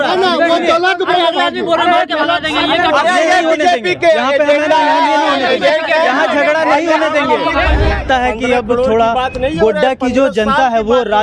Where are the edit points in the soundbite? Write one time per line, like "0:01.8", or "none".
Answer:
0:07.9